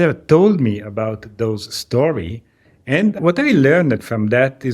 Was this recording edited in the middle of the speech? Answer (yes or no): yes